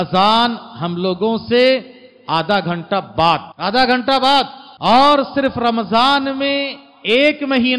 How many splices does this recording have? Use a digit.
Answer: 2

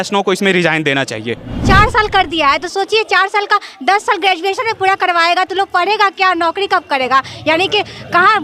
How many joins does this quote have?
1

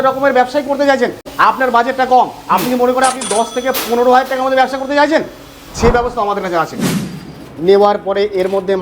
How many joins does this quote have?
2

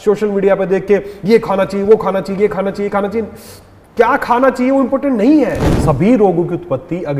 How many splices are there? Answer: 1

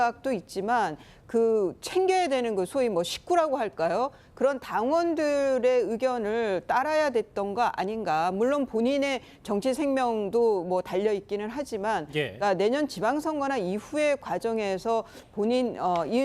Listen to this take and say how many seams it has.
1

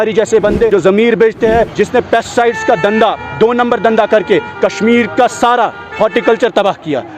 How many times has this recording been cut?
2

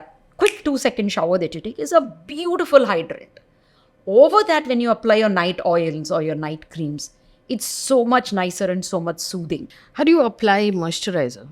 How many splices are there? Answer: 1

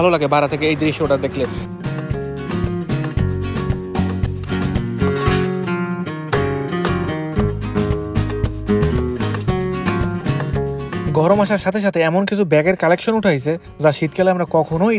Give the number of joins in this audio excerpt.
0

